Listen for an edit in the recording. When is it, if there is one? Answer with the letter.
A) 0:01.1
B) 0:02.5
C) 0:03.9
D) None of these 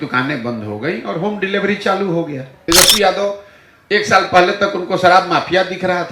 B